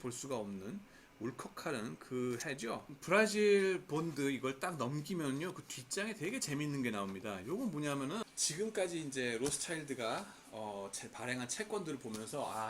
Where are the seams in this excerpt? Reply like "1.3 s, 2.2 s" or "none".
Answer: 2.9 s, 8.2 s